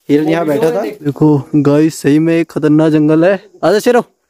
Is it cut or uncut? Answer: cut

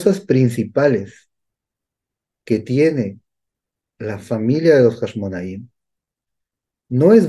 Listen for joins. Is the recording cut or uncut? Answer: uncut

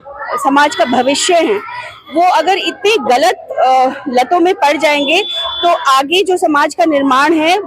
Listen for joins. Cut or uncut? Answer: uncut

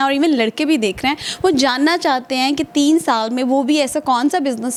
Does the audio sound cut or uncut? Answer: uncut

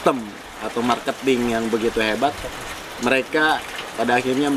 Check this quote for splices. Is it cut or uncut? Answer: uncut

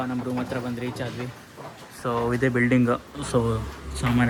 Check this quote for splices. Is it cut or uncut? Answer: uncut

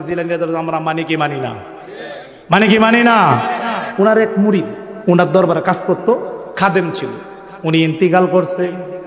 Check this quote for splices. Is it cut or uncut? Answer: cut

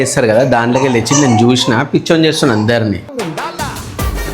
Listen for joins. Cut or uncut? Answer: cut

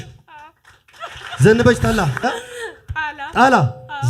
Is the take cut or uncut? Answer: cut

